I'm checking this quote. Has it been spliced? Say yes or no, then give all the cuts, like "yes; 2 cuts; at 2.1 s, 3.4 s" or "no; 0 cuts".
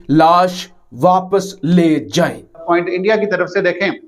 yes; 1 cut; at 2.6 s